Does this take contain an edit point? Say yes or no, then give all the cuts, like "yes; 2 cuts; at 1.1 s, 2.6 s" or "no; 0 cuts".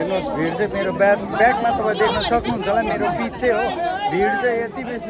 no; 0 cuts